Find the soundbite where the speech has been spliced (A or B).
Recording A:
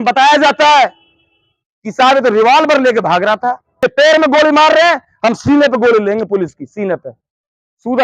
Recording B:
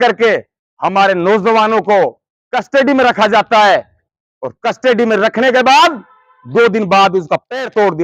A